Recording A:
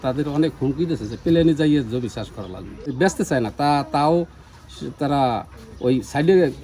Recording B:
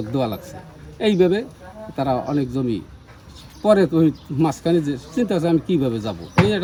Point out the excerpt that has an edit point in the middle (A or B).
A